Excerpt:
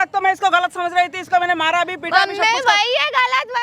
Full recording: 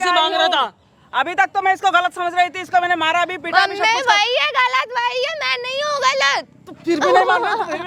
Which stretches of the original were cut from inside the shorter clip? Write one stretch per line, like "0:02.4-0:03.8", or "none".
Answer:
none